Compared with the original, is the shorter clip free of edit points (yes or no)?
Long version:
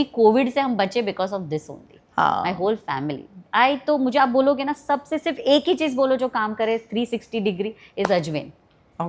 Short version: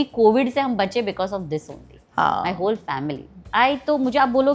yes